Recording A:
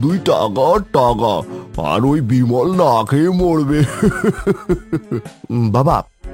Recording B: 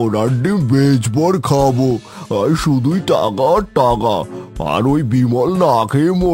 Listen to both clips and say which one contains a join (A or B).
A